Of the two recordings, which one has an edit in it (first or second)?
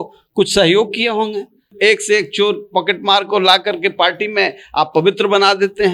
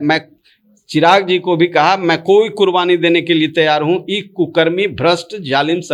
first